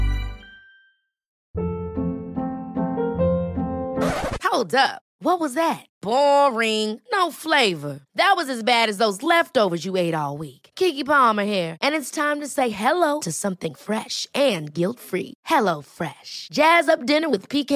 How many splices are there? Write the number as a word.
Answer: one